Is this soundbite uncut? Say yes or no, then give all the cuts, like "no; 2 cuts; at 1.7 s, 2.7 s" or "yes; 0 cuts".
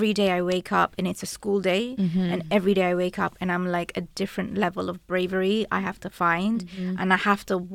yes; 0 cuts